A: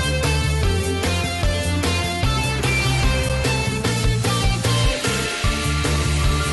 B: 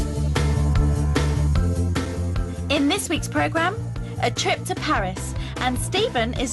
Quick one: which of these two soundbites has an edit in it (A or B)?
B